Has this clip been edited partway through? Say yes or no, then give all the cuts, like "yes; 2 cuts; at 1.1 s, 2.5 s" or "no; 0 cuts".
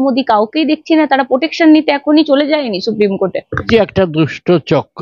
yes; 1 cut; at 3.6 s